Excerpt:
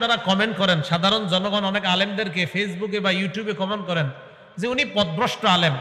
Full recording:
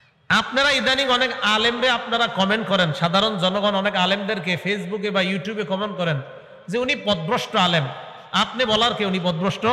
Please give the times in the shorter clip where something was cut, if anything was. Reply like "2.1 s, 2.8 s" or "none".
none